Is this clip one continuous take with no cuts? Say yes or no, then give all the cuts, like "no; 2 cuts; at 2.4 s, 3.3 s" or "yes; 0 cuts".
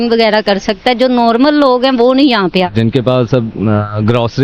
no; 1 cut; at 2.7 s